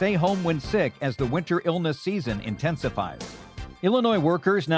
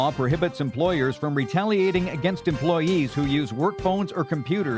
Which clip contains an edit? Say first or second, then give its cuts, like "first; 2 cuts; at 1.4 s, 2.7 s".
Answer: first; 1 cut; at 3.6 s